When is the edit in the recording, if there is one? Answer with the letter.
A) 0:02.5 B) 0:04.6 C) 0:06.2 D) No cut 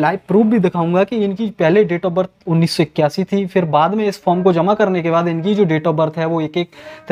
D